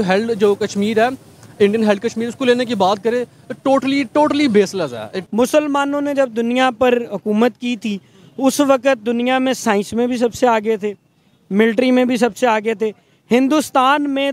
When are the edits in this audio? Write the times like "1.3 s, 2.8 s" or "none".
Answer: 5.2 s

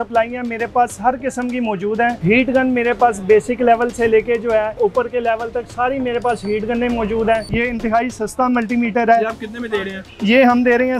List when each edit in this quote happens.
2.2 s, 4.8 s, 7.5 s

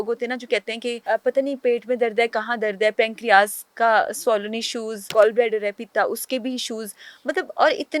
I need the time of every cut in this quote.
1.0 s, 5.0 s

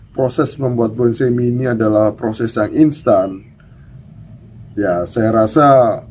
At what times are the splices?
none

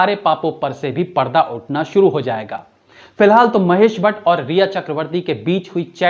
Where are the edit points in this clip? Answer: none

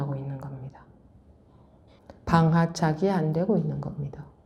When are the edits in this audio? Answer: 1.9 s

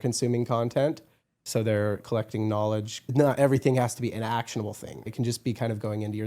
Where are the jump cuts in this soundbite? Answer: 2.0 s, 3.1 s, 5.1 s

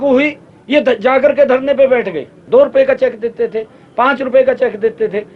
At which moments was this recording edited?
2.4 s

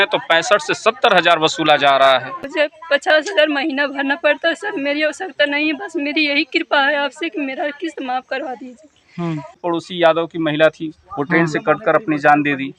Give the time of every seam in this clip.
2.5 s, 9.6 s

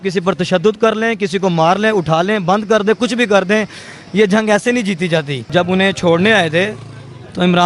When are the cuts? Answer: 5.4 s

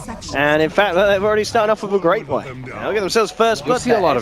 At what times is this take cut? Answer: none

